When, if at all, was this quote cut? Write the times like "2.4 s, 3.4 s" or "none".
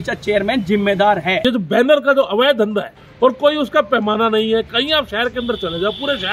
1.4 s, 3.0 s